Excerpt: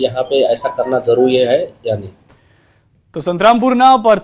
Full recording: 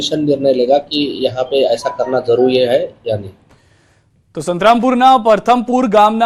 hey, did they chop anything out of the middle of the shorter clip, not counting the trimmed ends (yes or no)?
no